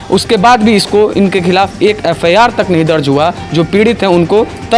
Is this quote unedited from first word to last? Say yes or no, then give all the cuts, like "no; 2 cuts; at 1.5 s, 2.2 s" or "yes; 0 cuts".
yes; 0 cuts